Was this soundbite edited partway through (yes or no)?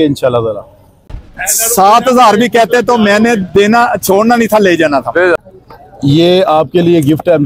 yes